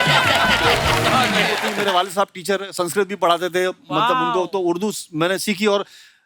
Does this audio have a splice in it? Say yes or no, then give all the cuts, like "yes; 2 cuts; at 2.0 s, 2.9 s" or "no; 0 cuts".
yes; 1 cut; at 1.7 s